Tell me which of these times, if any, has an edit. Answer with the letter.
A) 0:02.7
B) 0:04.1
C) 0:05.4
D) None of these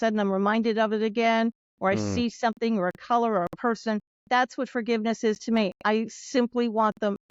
B